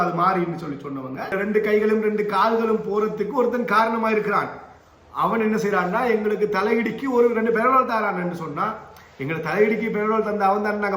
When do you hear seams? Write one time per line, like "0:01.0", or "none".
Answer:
0:01.3